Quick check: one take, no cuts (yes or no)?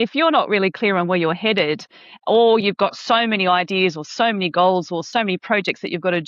no